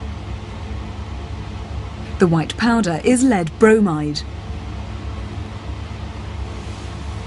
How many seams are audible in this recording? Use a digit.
1